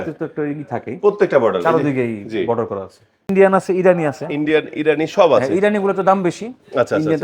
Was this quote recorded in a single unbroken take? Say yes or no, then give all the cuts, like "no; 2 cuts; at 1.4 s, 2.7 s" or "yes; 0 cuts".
no; 1 cut; at 3.3 s